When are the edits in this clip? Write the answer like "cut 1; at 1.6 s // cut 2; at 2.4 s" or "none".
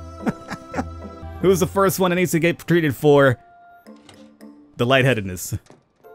cut 1; at 1.3 s